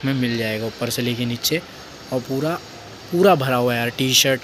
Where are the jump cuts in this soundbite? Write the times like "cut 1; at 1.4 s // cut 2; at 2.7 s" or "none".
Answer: none